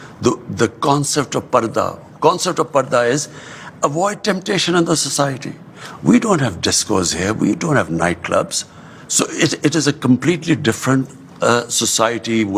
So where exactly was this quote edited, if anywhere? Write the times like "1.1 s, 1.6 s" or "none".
none